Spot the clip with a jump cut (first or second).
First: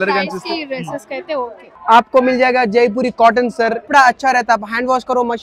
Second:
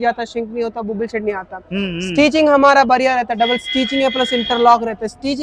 first